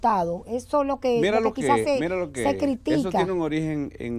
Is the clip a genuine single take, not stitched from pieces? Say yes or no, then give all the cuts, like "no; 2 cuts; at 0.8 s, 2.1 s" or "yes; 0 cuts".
yes; 0 cuts